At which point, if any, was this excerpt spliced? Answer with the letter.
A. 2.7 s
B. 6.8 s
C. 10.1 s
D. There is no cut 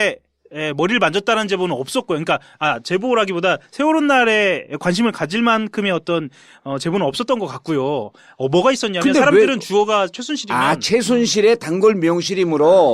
A